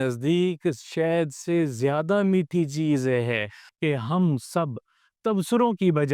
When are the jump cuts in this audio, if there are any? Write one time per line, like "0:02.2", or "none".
0:03.6